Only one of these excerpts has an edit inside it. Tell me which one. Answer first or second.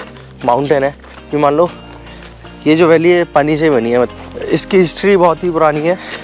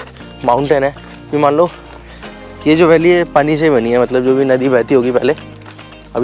first